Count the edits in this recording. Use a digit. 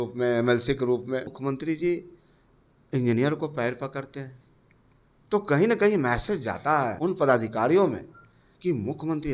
2